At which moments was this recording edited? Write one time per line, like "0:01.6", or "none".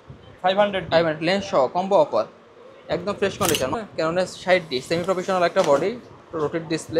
0:03.8